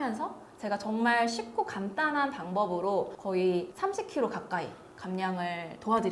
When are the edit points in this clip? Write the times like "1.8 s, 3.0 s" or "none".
3.2 s, 3.7 s